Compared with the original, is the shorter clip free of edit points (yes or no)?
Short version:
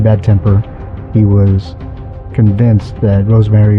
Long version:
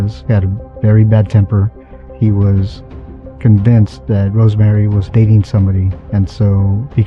yes